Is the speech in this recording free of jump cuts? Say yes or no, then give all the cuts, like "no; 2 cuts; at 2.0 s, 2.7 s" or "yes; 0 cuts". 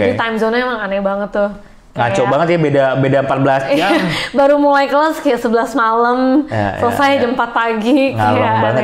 yes; 0 cuts